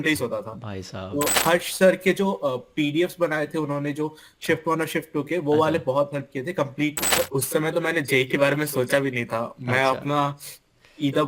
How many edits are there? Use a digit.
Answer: 2